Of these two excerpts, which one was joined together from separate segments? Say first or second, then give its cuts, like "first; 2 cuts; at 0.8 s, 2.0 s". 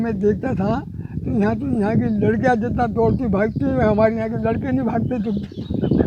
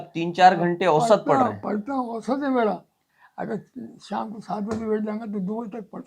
second; 1 cut; at 3.2 s